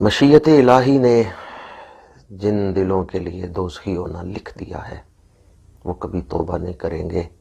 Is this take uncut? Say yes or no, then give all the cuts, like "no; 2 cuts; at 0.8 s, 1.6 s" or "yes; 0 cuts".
yes; 0 cuts